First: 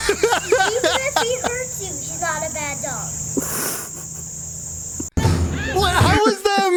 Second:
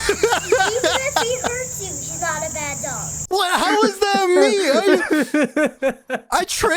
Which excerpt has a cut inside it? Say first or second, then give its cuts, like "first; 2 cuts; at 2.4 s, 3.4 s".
second; 1 cut; at 3.3 s